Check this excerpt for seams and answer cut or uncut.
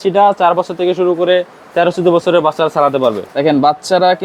cut